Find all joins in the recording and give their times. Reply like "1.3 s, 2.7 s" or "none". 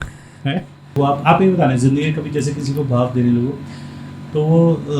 1.0 s